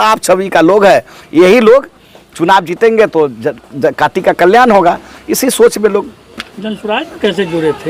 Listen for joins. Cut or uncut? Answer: uncut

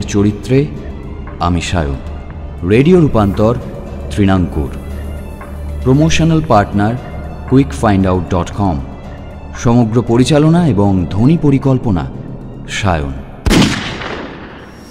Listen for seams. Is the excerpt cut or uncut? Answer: cut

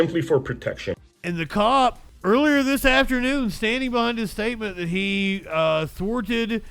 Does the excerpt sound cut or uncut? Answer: cut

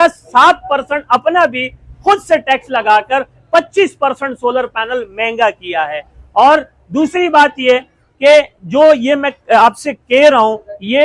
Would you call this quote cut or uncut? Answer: uncut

